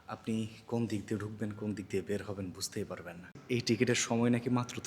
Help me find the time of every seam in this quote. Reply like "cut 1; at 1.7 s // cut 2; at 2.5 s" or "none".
cut 1; at 3.4 s